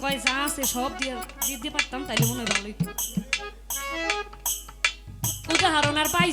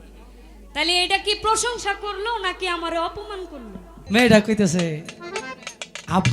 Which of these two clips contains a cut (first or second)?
second